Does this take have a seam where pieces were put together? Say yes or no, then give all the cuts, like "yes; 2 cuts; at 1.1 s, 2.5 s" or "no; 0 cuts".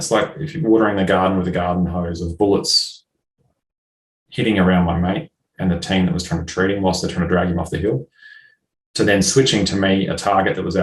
no; 0 cuts